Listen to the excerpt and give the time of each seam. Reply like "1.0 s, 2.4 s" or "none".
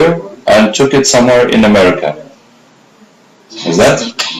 none